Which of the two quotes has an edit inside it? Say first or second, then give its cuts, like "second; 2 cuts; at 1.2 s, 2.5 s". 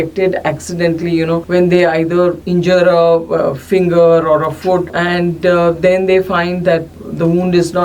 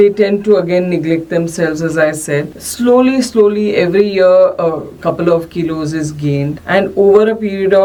first; 4 cuts; at 1.4 s, 2.4 s, 5.0 s, 6.9 s